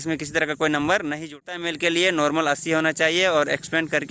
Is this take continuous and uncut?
no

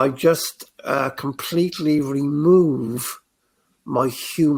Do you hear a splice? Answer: no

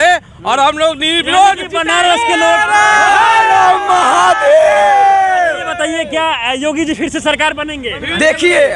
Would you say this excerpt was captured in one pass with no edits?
yes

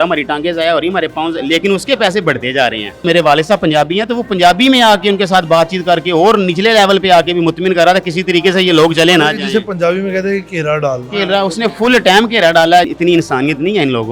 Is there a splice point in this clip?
yes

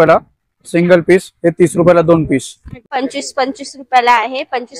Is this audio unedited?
no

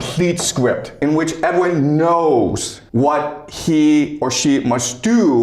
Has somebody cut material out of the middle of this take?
yes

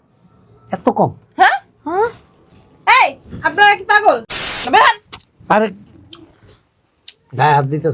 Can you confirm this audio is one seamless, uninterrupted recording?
no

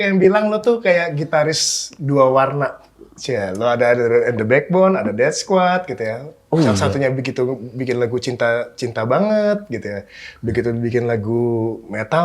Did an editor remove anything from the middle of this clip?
no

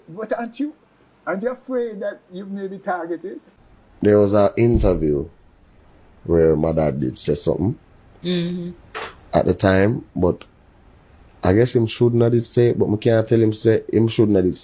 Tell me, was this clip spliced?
yes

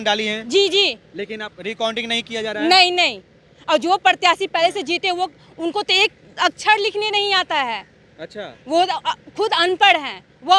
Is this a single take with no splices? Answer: yes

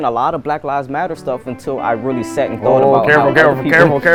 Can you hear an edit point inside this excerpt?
no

